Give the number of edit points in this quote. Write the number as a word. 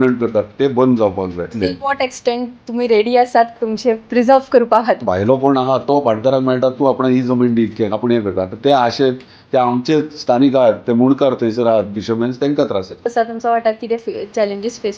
three